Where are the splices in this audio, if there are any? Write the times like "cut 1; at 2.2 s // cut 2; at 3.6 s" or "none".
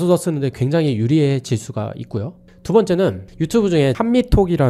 none